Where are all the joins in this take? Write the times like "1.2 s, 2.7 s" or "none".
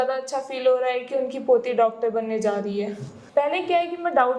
3.1 s